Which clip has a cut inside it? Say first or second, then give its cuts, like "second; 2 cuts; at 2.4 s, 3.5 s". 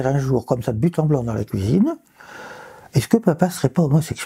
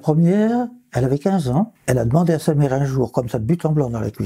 second; 1 cut; at 1.8 s